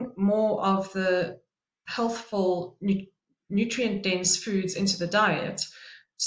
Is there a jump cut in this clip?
no; 0 cuts

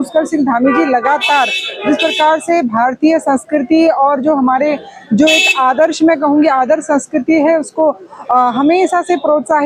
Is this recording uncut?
yes; 0 cuts

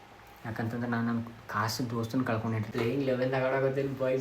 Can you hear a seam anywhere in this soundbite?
yes; 1 cut; at 2.7 s

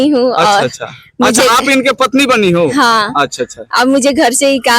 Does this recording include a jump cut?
no; 0 cuts

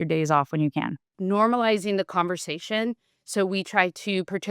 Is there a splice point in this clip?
yes; 1 cut; at 1.0 s

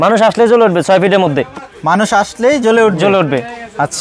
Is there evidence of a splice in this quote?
no; 0 cuts

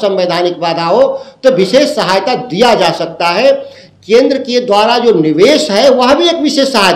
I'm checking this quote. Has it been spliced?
no; 0 cuts

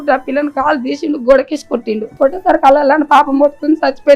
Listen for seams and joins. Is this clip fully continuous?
no; 1 cut; at 2.1 s

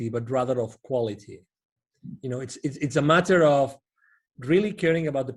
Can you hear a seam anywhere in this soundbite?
no; 0 cuts

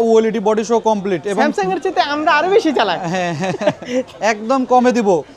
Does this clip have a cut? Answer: yes; 1 cut; at 4.1 s

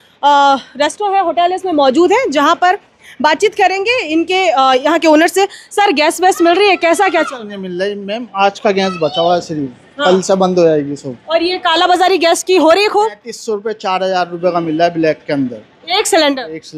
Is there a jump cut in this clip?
no; 0 cuts

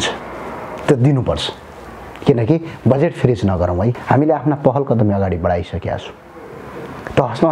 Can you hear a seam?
yes; 1 cut; at 4.0 s

